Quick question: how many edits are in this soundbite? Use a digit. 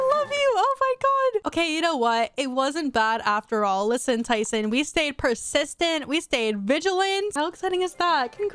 1